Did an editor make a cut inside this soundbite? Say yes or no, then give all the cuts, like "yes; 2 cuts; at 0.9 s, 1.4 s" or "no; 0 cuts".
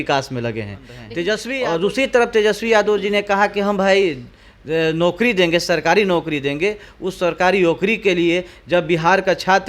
yes; 1 cut; at 1.5 s